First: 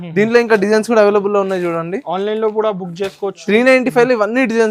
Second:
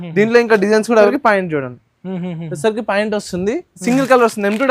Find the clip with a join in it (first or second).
second